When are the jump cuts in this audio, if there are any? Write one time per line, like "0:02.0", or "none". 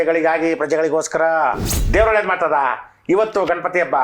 0:01.8